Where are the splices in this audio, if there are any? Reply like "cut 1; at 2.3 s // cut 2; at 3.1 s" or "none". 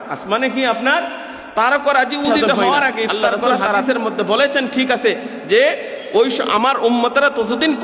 cut 1; at 3.8 s